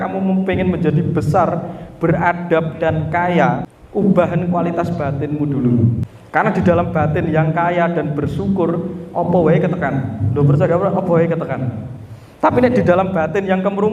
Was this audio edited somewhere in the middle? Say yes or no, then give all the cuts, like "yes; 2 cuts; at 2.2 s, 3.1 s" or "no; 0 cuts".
yes; 2 cuts; at 3.7 s, 6.1 s